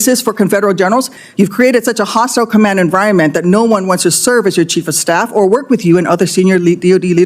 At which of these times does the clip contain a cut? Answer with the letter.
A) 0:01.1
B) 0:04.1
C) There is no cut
A